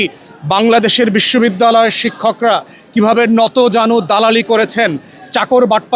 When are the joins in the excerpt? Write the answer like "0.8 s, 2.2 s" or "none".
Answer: none

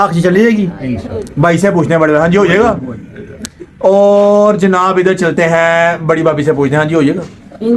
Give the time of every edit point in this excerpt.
none

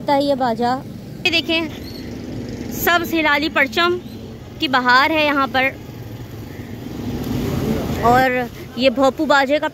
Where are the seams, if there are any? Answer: 1.2 s, 7.9 s

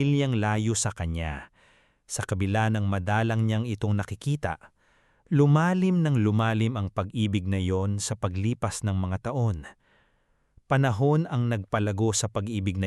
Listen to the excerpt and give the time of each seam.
none

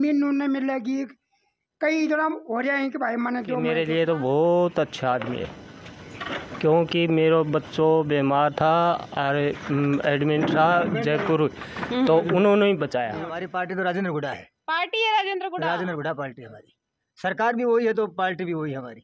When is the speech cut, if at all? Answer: 3.7 s, 13.4 s

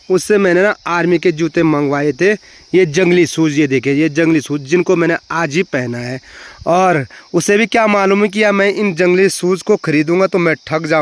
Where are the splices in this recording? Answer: none

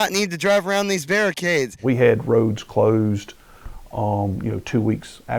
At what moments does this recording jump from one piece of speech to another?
none

